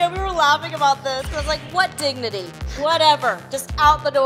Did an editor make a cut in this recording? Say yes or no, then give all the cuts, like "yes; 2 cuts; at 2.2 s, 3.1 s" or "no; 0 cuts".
no; 0 cuts